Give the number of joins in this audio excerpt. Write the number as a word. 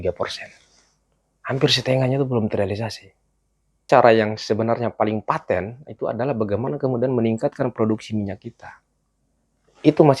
one